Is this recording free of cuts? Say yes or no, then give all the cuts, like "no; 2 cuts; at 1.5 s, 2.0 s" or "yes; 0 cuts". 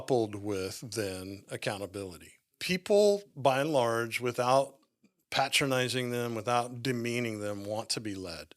no; 1 cut; at 2.6 s